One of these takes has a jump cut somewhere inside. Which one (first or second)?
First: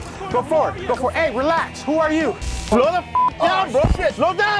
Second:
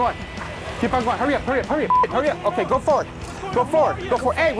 first